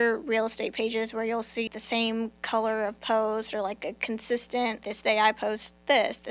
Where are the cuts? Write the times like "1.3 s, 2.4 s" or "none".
1.7 s, 4.9 s